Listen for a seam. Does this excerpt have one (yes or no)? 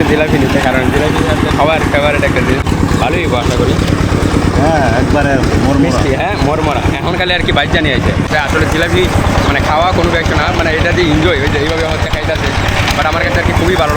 yes